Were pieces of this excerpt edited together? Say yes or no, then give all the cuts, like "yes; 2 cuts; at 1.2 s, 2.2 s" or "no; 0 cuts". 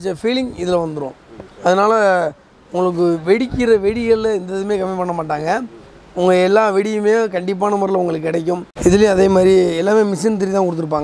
yes; 1 cut; at 8.7 s